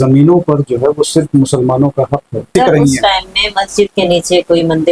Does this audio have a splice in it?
yes; 1 cut; at 2.5 s

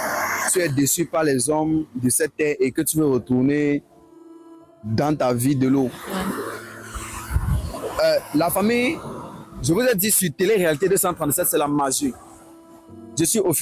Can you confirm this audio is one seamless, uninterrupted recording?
yes; 0 cuts

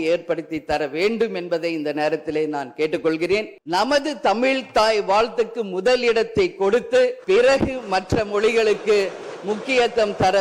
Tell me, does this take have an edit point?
yes; 2 cuts; at 3.5 s, 7.2 s

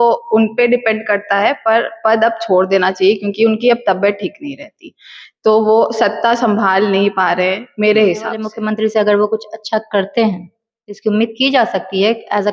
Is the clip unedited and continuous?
no; 1 cut; at 8.5 s

